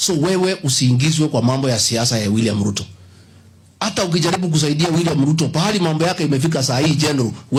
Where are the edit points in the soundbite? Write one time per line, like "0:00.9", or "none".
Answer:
none